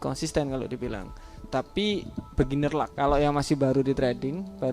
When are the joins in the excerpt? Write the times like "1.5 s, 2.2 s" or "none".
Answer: 2.9 s